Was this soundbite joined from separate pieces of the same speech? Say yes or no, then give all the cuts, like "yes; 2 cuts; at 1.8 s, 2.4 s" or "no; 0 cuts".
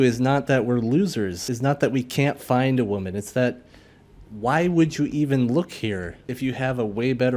yes; 2 cuts; at 1.4 s, 6.2 s